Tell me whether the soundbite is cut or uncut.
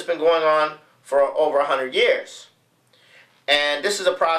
cut